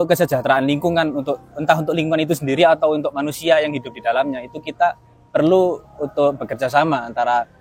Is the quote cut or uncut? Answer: uncut